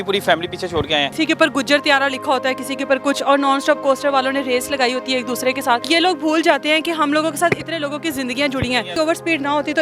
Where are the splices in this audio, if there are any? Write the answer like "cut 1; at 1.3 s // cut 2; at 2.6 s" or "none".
cut 1; at 1.1 s // cut 2; at 5.9 s // cut 3; at 9.0 s